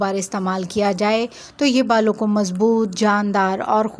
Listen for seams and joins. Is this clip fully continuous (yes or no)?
yes